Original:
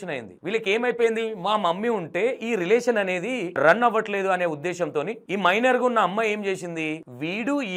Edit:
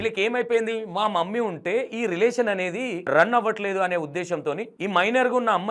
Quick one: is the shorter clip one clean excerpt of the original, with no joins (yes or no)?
yes